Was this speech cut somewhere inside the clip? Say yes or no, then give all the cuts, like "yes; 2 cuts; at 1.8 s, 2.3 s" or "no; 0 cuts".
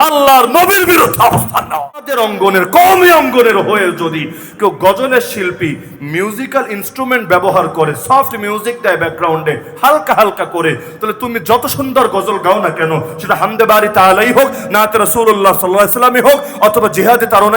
yes; 1 cut; at 2.1 s